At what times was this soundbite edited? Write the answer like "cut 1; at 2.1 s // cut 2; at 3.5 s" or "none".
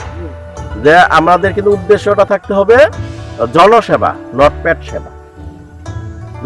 none